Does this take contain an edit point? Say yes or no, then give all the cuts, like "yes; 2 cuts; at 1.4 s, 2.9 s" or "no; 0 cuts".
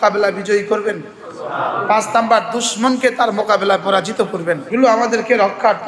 yes; 1 cut; at 4.7 s